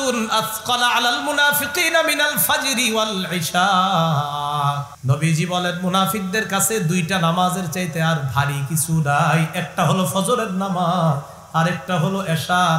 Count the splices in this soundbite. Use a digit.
1